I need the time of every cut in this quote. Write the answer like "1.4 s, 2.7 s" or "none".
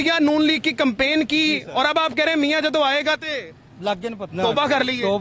4.2 s